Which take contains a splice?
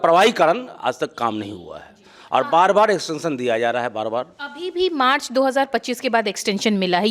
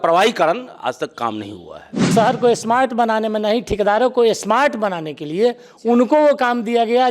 second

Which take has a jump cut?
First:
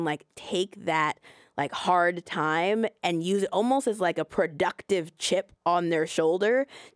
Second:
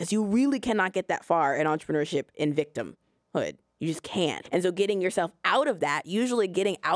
second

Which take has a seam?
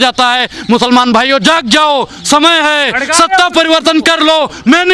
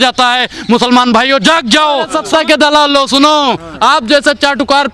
second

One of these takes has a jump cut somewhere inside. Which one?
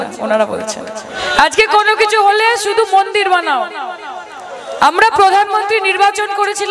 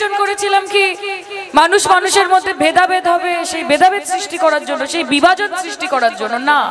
first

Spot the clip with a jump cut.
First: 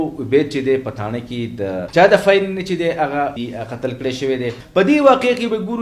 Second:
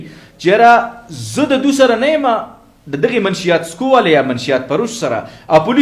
first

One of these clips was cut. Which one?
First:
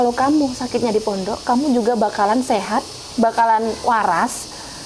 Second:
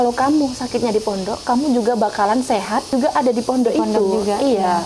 second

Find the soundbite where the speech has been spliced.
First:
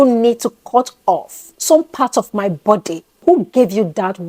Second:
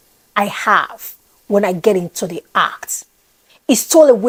first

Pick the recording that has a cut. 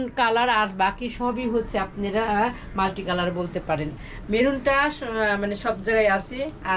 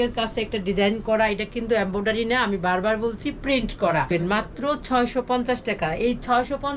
second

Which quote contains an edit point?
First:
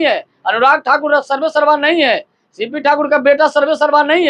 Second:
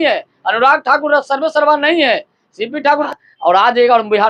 second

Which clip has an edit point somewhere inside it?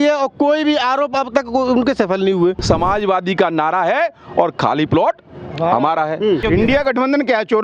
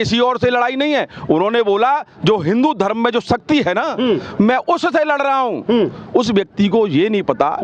first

